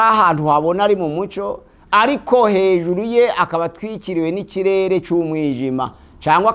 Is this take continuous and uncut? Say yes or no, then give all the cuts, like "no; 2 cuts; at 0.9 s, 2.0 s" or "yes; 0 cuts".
yes; 0 cuts